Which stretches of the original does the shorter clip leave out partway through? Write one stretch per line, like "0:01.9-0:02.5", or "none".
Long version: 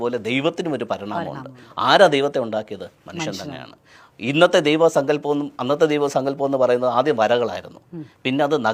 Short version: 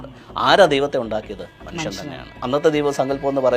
0:03.8-0:05.5